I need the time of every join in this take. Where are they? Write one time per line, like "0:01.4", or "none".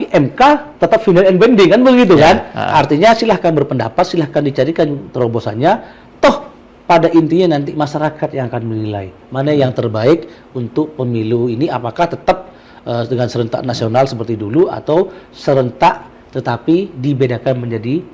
none

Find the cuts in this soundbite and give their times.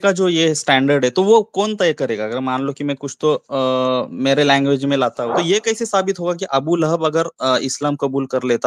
0:05.2

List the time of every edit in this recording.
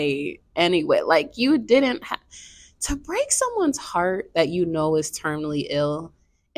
none

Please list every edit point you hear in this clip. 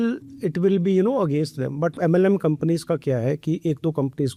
none

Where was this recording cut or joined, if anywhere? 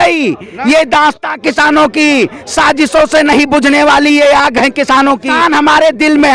0:05.3

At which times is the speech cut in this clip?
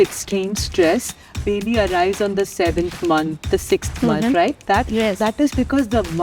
none

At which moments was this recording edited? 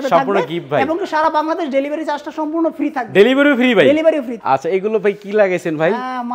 0:04.4

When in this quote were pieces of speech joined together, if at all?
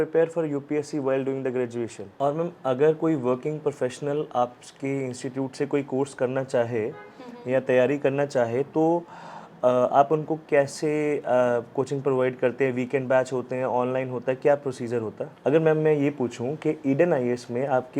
0:02.0
0:15.3

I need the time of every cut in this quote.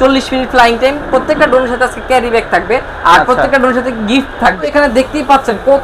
0:04.7

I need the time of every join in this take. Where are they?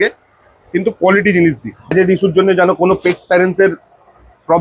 0:01.9

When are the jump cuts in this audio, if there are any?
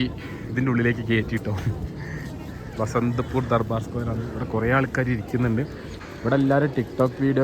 0:06.0

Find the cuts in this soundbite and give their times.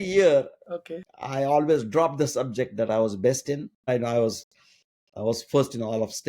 0:03.9

